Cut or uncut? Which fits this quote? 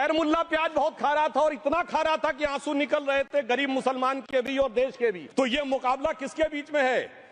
cut